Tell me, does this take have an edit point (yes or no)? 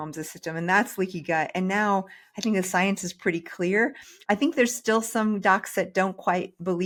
no